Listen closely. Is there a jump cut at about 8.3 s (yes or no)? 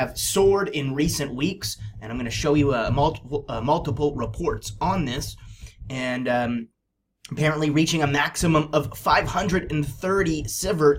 yes